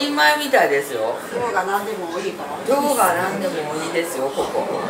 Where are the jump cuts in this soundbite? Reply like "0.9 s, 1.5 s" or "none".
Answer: 1.3 s